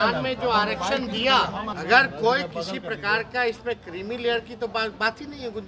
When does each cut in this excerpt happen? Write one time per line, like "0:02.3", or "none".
0:01.8